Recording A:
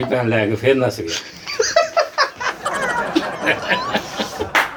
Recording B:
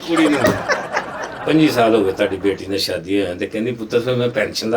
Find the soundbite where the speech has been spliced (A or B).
B